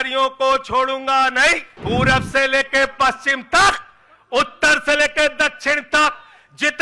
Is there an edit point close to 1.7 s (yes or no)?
yes